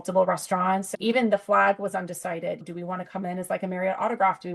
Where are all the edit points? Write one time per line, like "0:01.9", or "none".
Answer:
0:00.9